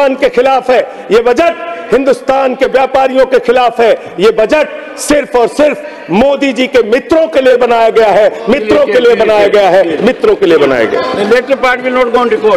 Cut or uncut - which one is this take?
uncut